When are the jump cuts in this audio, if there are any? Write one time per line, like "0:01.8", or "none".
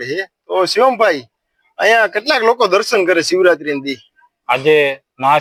none

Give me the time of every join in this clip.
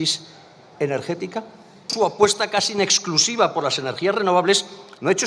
0:01.9

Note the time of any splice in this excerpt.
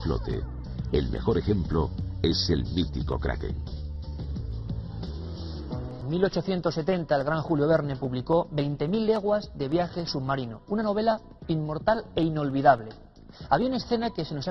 0:12.8

